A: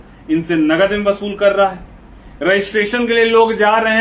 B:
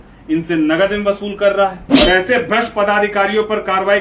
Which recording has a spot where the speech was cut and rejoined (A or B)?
B